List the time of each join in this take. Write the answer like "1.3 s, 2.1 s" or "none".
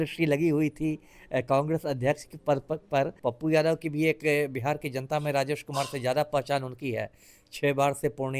3.1 s